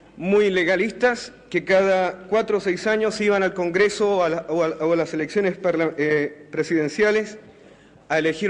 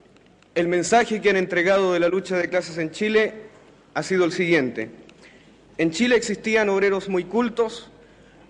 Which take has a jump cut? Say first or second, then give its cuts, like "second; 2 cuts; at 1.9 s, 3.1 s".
second; 1 cut; at 2.3 s